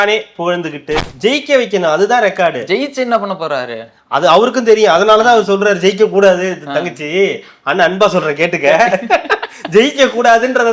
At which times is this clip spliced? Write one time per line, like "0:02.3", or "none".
0:01.1